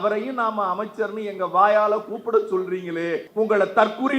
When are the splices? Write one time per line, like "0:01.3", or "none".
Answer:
0:03.3